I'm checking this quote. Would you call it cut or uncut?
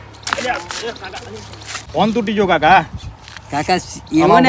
cut